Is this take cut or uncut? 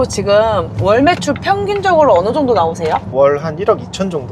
cut